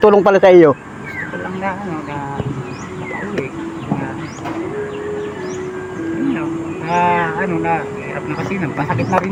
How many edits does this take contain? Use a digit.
0